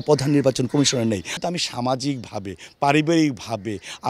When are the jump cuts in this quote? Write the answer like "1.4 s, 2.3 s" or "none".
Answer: 1.3 s